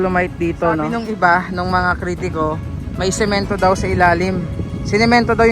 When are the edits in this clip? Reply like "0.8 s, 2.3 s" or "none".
1.0 s